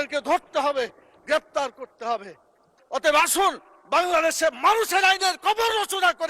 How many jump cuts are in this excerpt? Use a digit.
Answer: 1